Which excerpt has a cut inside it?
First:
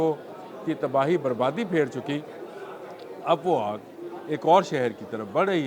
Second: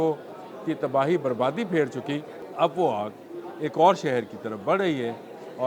second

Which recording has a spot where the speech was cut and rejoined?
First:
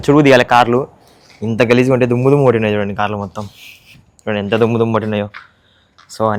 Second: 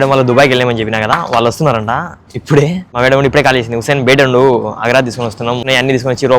second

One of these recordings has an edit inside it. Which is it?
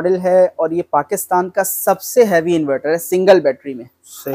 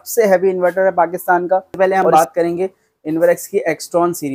second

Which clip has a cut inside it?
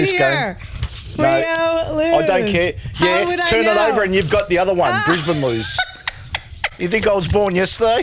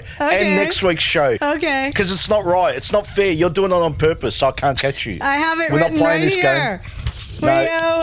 second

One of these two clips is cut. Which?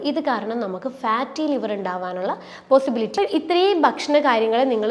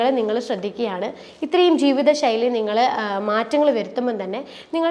first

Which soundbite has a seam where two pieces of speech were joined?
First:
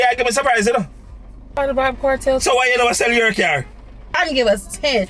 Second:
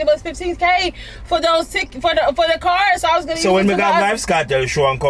first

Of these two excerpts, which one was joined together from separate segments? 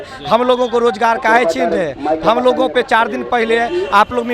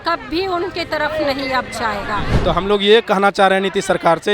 second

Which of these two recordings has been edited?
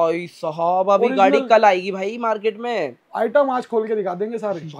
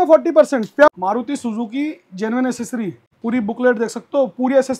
second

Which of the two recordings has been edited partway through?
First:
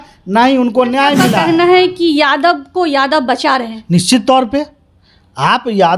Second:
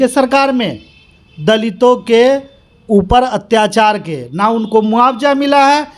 first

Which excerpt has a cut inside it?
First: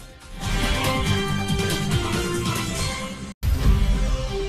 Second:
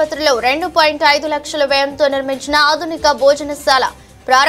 first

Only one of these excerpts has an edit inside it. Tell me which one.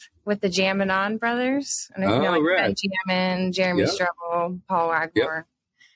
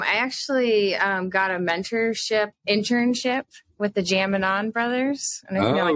second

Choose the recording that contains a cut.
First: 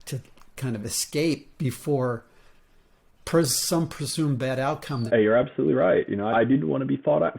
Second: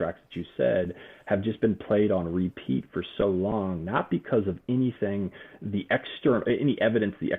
first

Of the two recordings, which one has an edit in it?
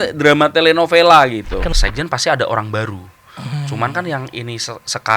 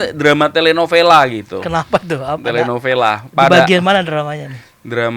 first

